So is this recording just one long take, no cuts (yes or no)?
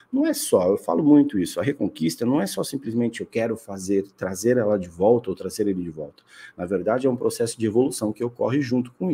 yes